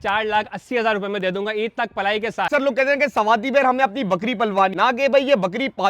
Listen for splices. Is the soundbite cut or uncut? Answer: cut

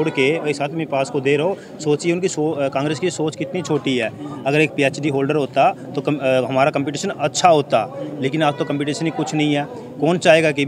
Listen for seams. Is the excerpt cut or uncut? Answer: uncut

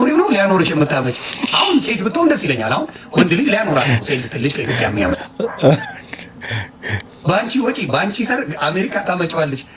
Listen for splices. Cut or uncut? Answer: uncut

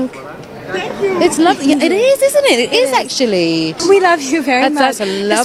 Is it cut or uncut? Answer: uncut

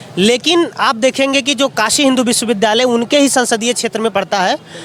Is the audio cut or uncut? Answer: uncut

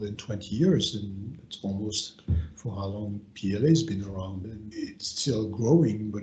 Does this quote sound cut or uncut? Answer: uncut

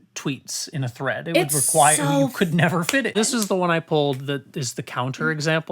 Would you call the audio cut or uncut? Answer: cut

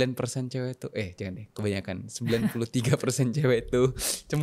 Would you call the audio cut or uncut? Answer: uncut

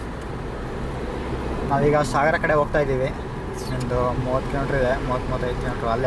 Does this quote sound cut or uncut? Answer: uncut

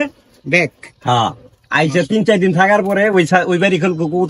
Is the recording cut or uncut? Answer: uncut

